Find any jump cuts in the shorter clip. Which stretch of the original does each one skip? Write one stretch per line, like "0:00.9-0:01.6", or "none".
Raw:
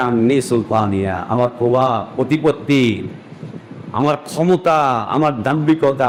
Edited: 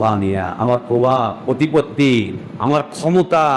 0:03.1-0:03.8